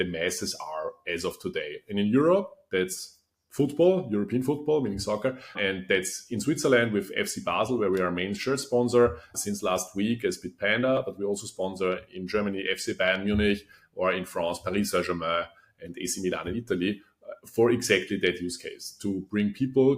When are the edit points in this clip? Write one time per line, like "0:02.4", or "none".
0:05.6
0:09.3